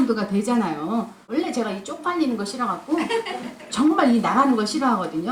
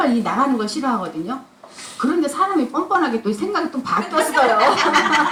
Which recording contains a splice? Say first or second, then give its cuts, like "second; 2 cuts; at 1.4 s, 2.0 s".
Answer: first; 1 cut; at 1.2 s